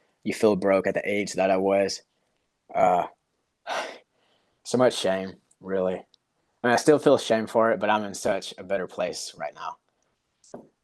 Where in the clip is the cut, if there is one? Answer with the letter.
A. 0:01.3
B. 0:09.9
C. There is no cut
C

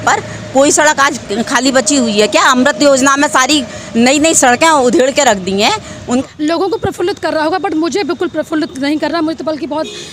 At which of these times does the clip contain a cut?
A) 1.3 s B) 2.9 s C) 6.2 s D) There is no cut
C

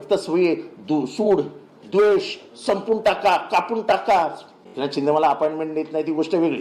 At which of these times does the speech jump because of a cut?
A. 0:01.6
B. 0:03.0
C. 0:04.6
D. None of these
C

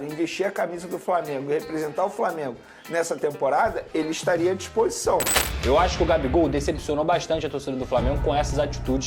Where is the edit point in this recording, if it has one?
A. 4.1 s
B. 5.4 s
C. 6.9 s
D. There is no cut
B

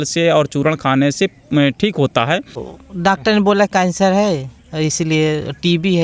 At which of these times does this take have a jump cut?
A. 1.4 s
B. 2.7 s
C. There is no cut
B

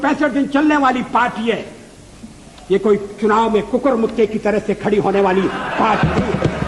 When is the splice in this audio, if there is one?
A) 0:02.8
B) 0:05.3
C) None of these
C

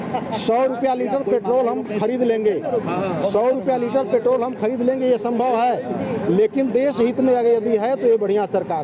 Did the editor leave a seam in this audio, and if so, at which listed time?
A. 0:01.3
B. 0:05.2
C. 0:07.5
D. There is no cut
D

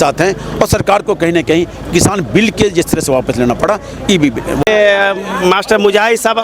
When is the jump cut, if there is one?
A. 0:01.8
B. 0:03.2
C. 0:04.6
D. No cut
C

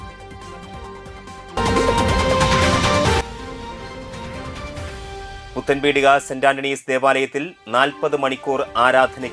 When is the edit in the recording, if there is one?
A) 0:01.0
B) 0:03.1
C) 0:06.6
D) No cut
A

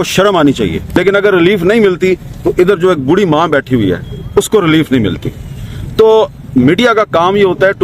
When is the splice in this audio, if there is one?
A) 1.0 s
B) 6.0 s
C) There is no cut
A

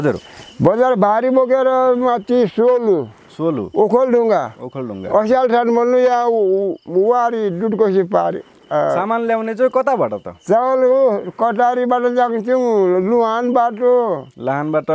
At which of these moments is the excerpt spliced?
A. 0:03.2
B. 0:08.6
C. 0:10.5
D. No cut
D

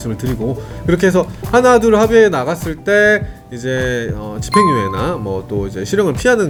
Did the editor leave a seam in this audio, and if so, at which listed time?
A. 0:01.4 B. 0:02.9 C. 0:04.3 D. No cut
D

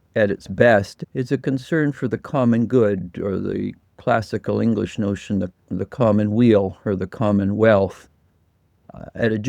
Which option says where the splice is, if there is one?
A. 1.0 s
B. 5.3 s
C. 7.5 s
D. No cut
A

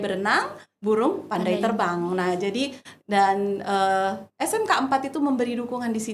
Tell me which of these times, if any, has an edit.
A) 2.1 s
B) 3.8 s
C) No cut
C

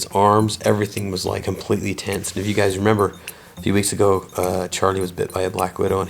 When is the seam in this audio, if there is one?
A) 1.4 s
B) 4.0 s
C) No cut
A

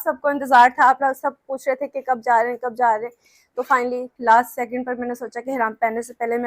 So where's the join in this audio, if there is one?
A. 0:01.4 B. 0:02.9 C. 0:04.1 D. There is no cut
C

